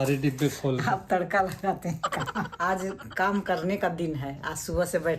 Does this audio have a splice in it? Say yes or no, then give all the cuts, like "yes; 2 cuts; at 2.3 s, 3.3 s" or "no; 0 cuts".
yes; 1 cut; at 2.5 s